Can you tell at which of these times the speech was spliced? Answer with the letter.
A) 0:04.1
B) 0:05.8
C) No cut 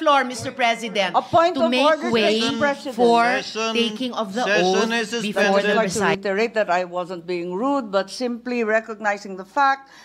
B